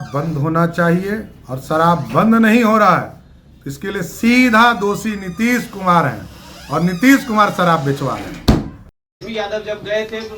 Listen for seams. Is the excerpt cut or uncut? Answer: uncut